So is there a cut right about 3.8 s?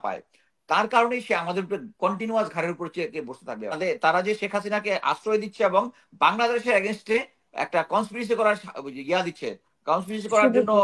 yes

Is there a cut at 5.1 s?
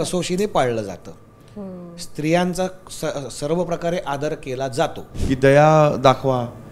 yes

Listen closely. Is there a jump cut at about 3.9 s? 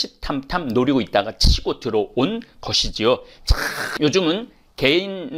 yes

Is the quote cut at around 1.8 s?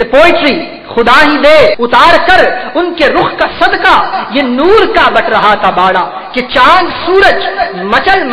yes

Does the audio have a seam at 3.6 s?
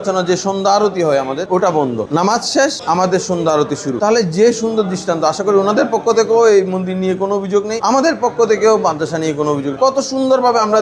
no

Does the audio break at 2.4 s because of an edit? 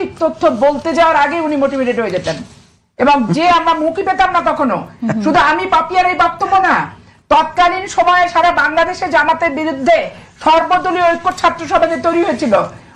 no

